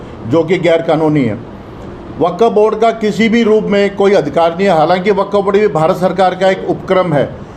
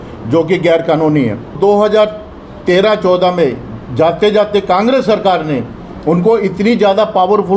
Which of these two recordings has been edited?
second; 1 cut; at 1.6 s

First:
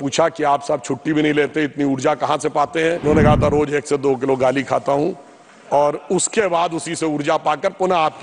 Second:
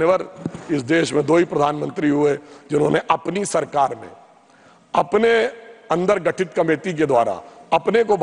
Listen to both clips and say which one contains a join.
first; 1 cut; at 3.0 s

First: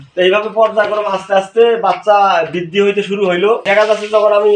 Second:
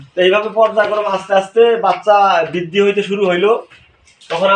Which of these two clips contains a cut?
first; 1 cut; at 3.7 s

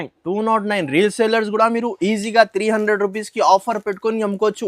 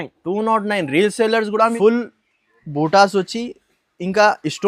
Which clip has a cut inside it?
second; 1 cut; at 1.7 s

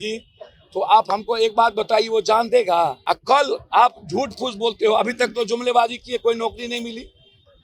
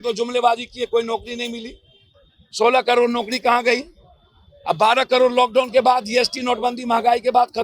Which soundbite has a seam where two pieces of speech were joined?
first; 1 cut; at 3.0 s

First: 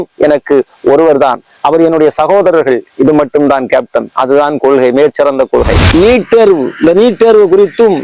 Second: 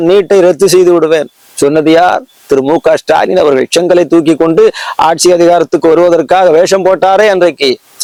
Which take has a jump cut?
first; 1 cut; at 5.8 s

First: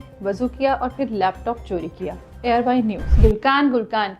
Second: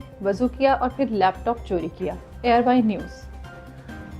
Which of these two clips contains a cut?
first; 1 cut; at 3.1 s

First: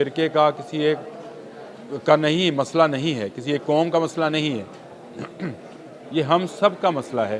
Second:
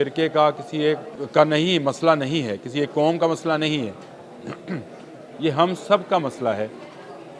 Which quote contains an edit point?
second; 1 cut; at 1.1 s

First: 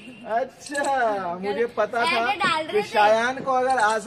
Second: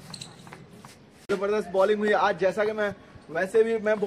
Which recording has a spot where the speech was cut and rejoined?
second; 1 cut; at 1.3 s

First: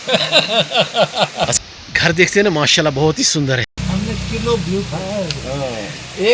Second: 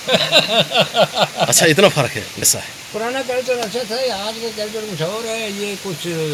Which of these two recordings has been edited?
first; 2 cuts; at 1.5 s, 3.7 s

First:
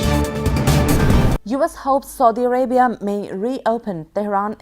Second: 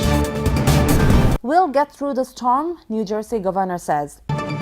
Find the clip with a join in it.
second; 1 cut; at 1.4 s

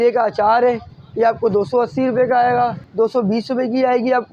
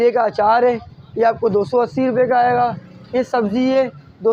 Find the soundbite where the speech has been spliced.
first; 1 cut; at 2.8 s

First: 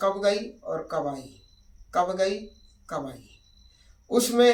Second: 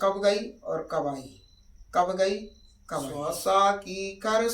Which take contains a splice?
second; 1 cut; at 3.1 s

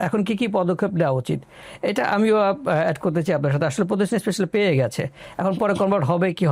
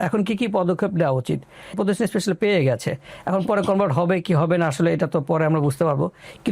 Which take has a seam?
second; 1 cut; at 1.8 s

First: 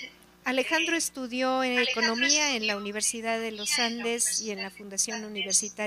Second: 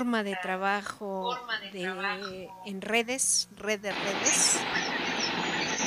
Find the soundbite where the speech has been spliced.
first; 1 cut; at 4.3 s

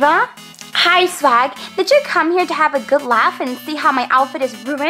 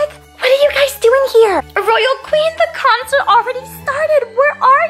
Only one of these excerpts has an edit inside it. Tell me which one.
second; 1 cut; at 1.7 s

